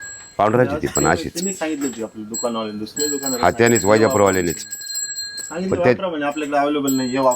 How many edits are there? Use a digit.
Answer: 2